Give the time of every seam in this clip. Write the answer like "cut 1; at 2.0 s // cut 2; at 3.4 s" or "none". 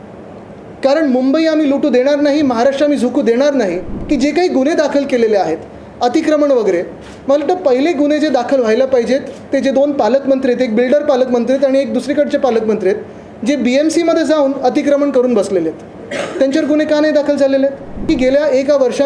cut 1; at 4.0 s // cut 2; at 18.1 s